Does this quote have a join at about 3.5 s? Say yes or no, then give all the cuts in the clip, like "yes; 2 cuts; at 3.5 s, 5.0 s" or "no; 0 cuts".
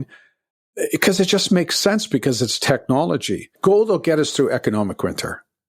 yes; 1 cut; at 3.5 s